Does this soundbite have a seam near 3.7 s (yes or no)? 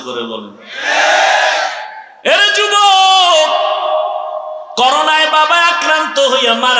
no